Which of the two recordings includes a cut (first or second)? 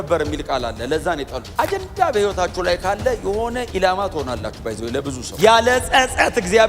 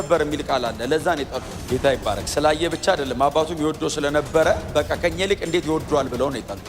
first